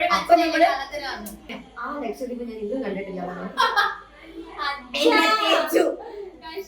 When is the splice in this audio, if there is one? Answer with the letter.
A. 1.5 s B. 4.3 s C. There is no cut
A